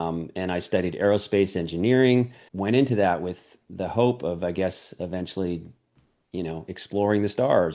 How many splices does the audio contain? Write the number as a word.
one